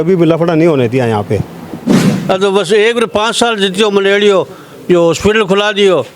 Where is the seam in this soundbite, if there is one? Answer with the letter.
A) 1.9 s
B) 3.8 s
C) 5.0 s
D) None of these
A